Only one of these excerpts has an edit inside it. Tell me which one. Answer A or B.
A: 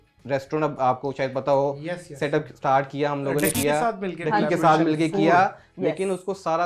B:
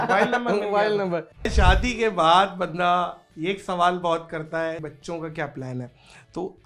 B